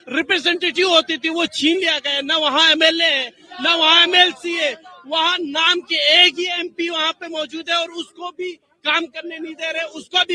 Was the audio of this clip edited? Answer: no; 0 cuts

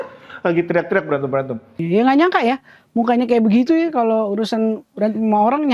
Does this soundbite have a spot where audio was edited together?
yes; 1 cut; at 1.8 s

